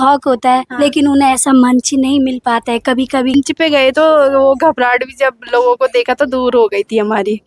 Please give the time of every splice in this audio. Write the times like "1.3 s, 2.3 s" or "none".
3.3 s